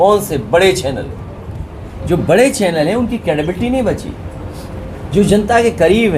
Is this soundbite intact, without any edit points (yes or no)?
yes